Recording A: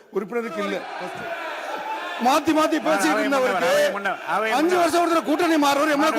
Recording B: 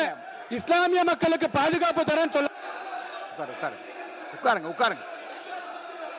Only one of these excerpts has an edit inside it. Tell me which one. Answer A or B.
A